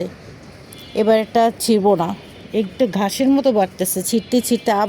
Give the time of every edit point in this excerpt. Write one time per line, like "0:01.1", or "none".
none